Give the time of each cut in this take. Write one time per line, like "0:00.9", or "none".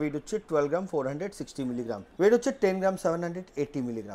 0:02.1